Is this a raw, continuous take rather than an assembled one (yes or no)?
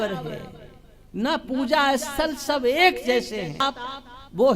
no